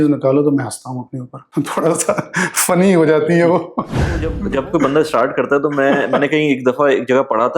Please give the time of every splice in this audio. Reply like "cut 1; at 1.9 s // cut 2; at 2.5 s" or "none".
cut 1; at 1.5 s // cut 2; at 4.4 s